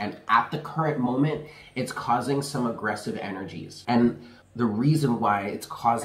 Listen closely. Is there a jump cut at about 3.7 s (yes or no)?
yes